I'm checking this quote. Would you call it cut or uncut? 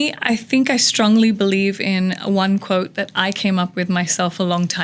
uncut